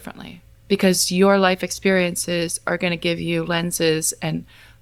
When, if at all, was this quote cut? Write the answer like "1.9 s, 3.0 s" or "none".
none